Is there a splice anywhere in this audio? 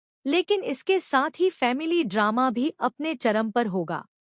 no; 0 cuts

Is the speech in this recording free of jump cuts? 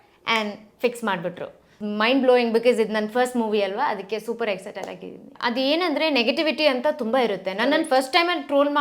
no; 2 cuts; at 1.8 s, 5.3 s

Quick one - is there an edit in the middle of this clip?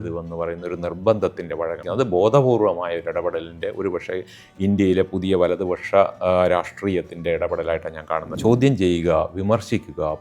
yes; 2 cuts; at 1.8 s, 8.3 s

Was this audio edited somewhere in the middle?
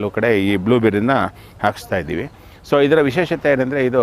no; 0 cuts

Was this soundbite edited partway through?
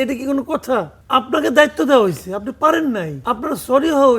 yes; 2 cuts; at 1.0 s, 3.1 s

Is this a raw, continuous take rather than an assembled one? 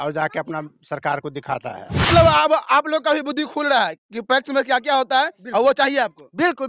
no; 1 cut; at 2.1 s

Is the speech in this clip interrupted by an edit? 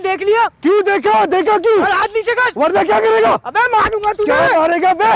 no; 0 cuts

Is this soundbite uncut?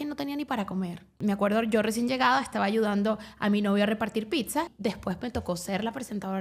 no; 2 cuts; at 1.2 s, 4.7 s

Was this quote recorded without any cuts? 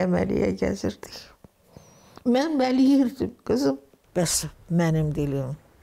no; 1 cut; at 3.9 s

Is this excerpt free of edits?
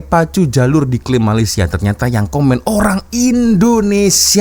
yes; 0 cuts

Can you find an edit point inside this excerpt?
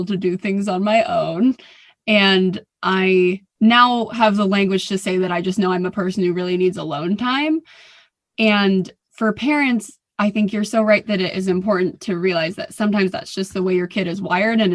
yes; 2 cuts; at 3.5 s, 9.0 s

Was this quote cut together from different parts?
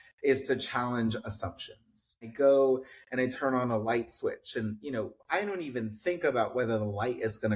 yes; 1 cut; at 2.3 s

